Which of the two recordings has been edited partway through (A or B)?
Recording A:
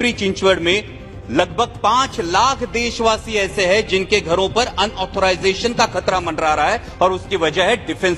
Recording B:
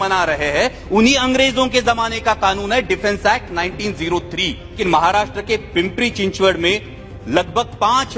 B